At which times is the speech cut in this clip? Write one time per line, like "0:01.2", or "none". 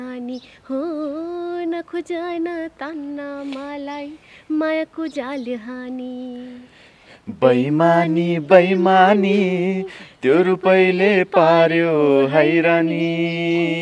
none